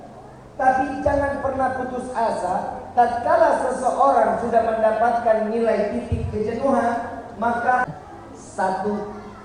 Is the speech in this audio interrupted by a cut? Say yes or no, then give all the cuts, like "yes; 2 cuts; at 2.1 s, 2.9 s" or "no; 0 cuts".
yes; 1 cut; at 7.8 s